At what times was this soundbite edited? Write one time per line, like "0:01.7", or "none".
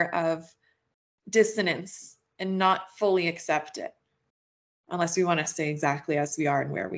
none